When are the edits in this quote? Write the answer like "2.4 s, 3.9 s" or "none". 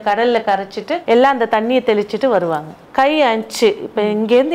0.9 s, 2.8 s